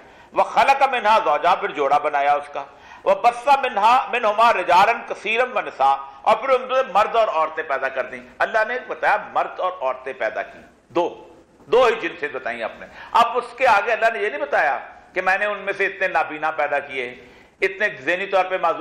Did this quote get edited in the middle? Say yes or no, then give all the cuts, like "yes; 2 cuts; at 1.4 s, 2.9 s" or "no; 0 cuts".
no; 0 cuts